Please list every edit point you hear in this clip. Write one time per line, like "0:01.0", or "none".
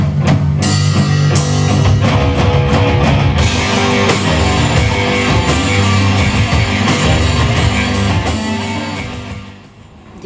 0:05.8